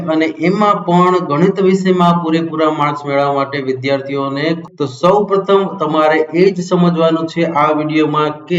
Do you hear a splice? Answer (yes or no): yes